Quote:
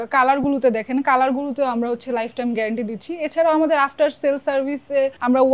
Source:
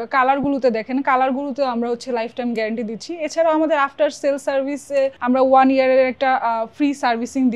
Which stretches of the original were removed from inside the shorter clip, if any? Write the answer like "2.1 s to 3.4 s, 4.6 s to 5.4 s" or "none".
none

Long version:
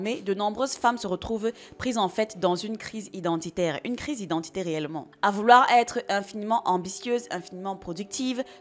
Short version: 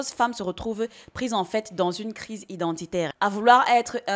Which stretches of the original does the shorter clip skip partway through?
3.8 s to 5.1 s

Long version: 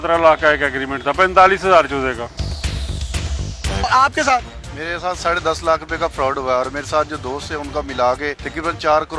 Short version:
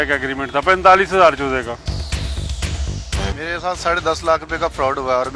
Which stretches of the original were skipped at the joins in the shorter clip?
3.7 s to 4.6 s

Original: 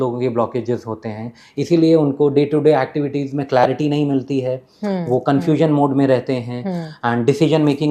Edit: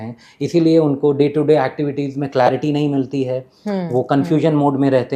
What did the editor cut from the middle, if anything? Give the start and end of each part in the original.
none

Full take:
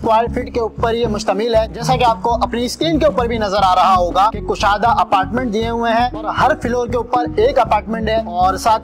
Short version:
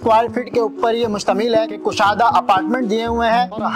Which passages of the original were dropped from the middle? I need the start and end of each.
1.8 s to 4.4 s

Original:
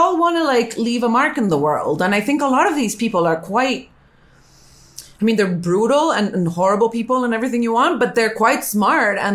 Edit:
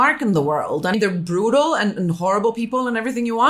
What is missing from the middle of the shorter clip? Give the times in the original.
2.1 s to 5.3 s

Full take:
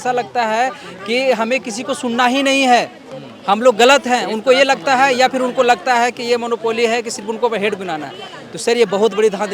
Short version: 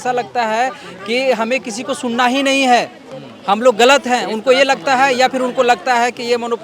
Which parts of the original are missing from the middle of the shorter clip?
none

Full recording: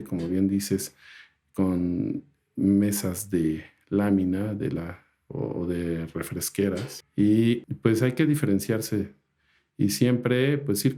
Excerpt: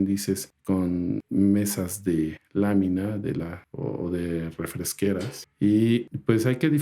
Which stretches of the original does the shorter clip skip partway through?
1.4 s to 2.2 s, 3.7 s to 3.8 s, 5.0 s to 5.2 s

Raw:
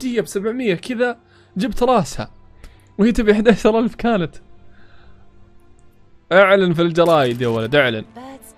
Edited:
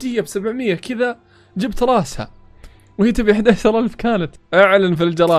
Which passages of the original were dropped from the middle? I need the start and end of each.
4.4 s to 6.1 s

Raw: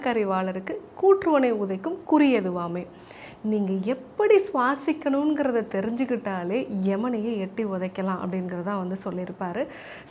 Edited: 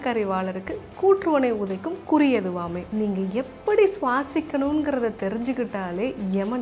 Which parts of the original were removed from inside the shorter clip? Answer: 2.8 s to 3.3 s

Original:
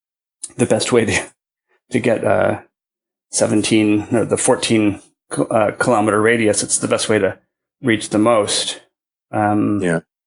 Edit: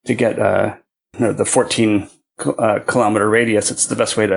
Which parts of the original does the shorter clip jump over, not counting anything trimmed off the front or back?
3.0 s to 4.1 s

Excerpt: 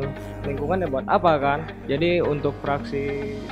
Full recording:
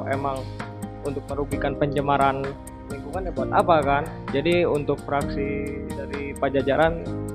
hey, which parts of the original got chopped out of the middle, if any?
none

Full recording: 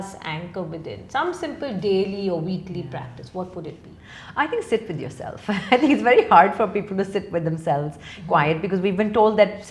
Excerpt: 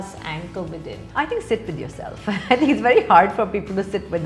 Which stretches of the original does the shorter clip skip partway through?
1.0 s to 4.2 s

